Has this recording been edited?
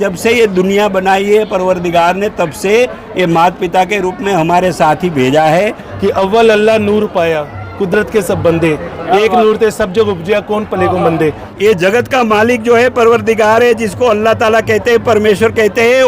yes; 2 cuts; at 5.8 s, 11.4 s

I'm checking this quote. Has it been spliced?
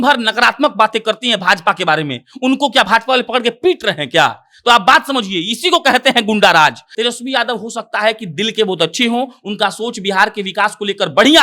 yes; 1 cut; at 6.9 s

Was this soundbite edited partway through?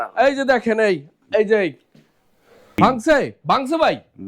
yes; 1 cut; at 2.8 s

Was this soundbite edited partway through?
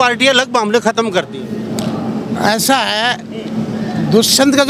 no; 0 cuts

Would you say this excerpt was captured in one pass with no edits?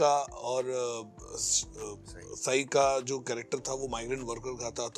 yes; 0 cuts

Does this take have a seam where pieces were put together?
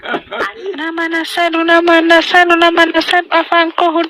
yes; 1 cut; at 0.9 s

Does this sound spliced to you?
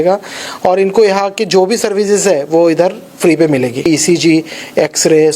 yes; 1 cut; at 3.9 s

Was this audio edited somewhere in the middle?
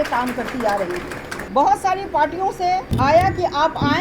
yes; 2 cuts; at 1.3 s, 2.9 s

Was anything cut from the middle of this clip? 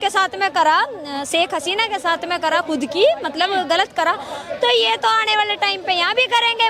no; 0 cuts

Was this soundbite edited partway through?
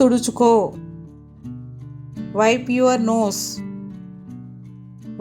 no; 0 cuts

